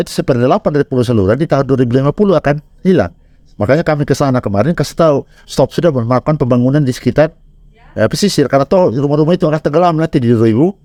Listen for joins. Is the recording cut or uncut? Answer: uncut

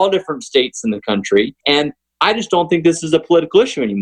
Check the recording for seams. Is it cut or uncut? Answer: cut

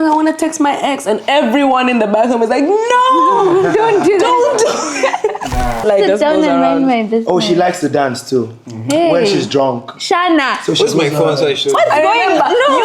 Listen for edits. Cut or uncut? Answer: cut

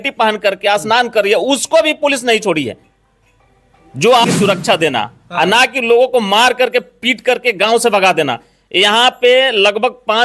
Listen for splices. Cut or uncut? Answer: cut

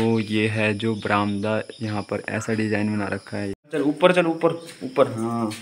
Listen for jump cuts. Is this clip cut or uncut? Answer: cut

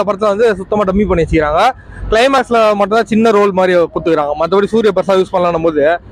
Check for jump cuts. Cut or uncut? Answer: uncut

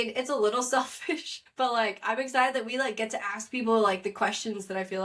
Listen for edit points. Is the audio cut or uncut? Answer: cut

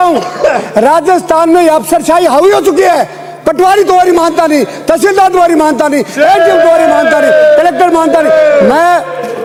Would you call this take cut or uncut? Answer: uncut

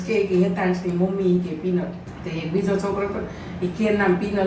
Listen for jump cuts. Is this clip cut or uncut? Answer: uncut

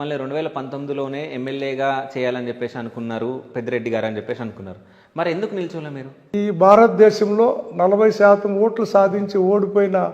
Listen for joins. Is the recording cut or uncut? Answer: cut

